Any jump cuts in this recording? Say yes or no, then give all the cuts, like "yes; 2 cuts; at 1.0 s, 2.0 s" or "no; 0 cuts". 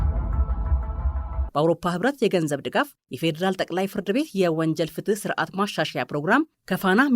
yes; 1 cut; at 1.2 s